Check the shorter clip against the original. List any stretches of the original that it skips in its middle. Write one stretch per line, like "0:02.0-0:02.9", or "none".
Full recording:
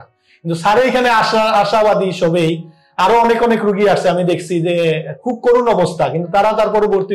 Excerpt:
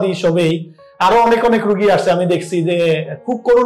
none

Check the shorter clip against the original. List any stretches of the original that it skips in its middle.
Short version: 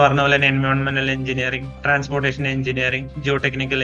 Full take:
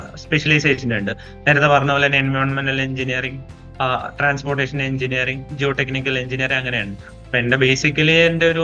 0:03.5-0:04.1

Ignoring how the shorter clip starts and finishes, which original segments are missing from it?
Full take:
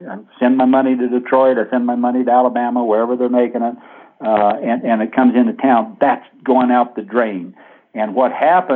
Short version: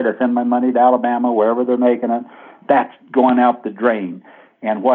0:04.1-0:05.9

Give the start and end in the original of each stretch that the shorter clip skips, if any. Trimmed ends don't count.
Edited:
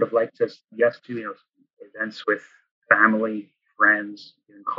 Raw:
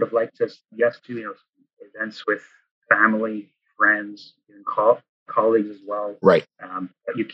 none

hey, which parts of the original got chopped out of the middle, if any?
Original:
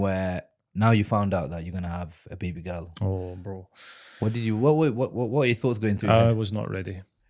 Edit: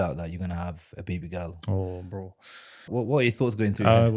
0:04.2-0:05.1

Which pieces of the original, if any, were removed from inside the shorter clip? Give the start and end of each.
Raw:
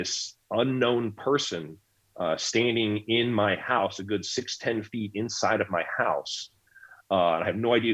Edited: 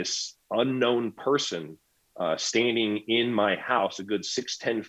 none

